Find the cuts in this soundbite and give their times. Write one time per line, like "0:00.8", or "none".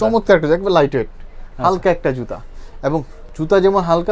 none